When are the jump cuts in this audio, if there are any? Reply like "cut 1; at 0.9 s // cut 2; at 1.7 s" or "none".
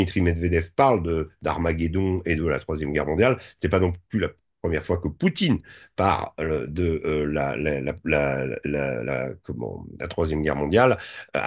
none